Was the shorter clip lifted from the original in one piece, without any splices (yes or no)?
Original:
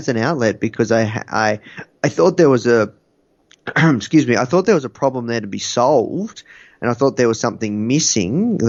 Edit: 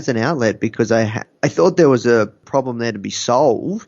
no